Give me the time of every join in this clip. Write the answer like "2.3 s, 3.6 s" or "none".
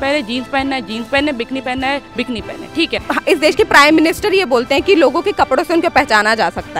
3.0 s